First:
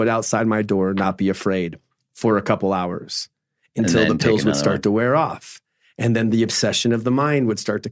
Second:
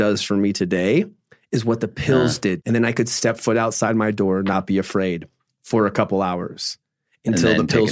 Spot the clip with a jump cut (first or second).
second